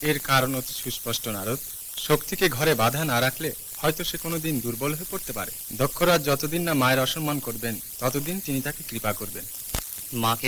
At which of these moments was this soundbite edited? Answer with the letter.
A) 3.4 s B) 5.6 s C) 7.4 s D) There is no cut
B